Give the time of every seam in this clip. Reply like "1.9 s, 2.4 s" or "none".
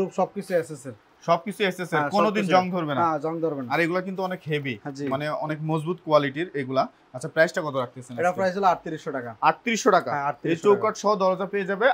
none